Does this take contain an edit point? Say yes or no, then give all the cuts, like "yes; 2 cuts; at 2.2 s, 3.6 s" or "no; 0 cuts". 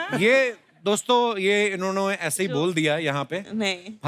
no; 0 cuts